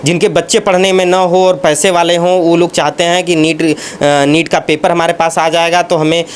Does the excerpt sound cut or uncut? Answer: uncut